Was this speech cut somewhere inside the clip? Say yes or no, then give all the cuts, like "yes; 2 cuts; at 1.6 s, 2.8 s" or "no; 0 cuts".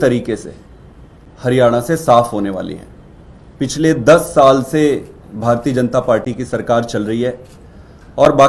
no; 0 cuts